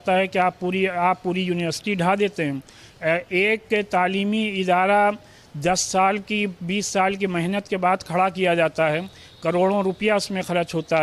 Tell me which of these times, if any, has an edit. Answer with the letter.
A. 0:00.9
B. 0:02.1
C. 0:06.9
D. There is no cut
D